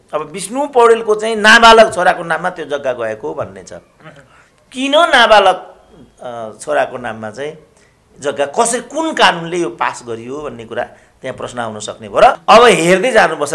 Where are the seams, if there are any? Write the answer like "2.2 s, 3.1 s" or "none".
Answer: 12.4 s